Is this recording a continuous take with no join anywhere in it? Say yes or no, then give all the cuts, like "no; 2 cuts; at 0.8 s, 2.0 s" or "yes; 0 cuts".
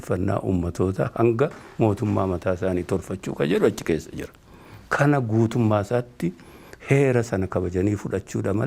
yes; 0 cuts